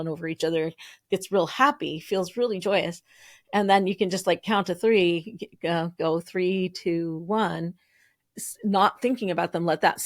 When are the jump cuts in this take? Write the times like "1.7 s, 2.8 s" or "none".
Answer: none